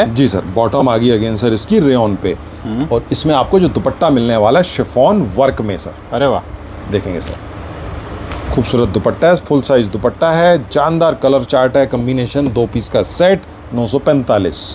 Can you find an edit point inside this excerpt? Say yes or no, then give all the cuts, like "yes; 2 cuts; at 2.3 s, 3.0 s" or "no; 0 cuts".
no; 0 cuts